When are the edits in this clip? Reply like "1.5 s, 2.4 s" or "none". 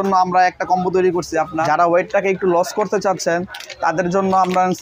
1.6 s

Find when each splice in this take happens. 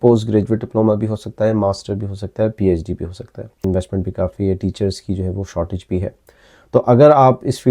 3.6 s

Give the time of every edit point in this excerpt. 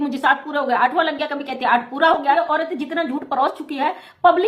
2.4 s

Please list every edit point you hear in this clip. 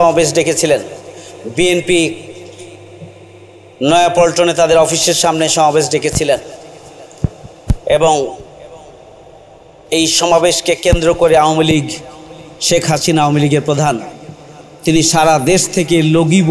none

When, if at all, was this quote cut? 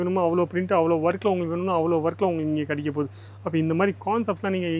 none

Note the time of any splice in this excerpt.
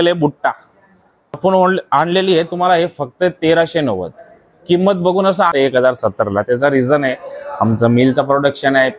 1.4 s, 5.5 s

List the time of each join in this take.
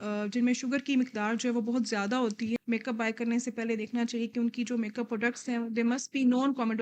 2.6 s

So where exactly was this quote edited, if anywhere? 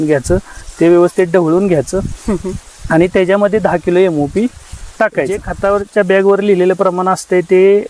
5.5 s

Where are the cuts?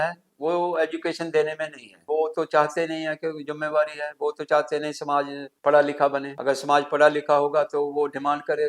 2.0 s, 5.4 s, 6.3 s

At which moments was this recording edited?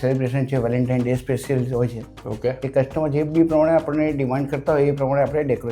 none

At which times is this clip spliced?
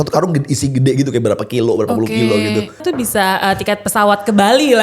2.8 s

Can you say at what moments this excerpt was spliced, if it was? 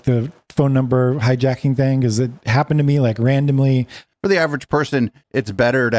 4.0 s

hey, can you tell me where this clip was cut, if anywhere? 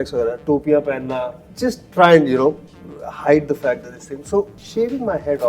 1.4 s, 4.6 s

